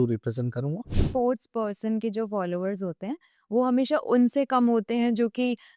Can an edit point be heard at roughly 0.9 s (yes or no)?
yes